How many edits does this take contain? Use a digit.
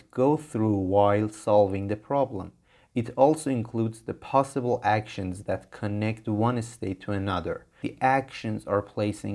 1